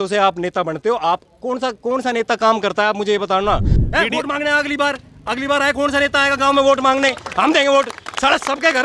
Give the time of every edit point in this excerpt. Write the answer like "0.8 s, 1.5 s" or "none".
3.7 s